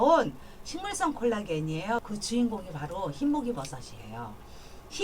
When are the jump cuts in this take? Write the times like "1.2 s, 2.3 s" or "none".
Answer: 2.0 s

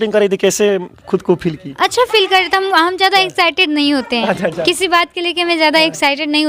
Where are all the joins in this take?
none

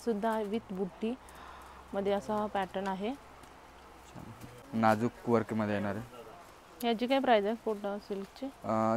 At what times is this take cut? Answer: 4.6 s

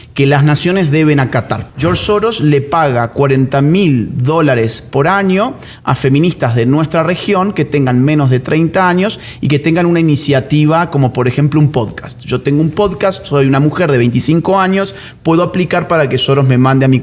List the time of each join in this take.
1.6 s

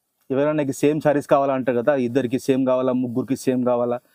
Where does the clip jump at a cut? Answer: none

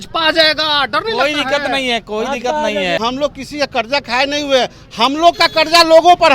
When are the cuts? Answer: 3.0 s

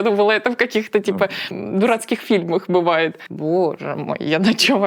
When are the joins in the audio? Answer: 1.5 s, 3.2 s

